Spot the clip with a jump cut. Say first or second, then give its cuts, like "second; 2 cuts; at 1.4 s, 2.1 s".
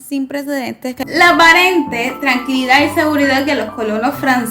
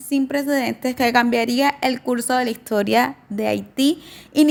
first; 1 cut; at 1.0 s